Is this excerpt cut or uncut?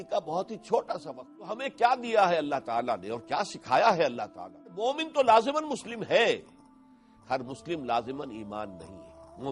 cut